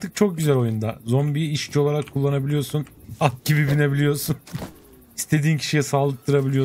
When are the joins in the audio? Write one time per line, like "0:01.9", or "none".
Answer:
0:03.0